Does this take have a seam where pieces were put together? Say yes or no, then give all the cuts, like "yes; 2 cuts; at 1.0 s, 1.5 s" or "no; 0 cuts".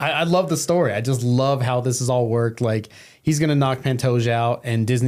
no; 0 cuts